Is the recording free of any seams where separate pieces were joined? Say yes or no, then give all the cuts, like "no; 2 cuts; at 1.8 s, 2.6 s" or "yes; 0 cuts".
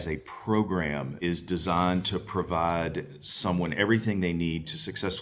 no; 1 cut; at 1.1 s